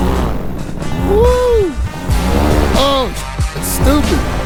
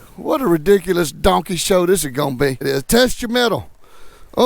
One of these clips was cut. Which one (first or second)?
second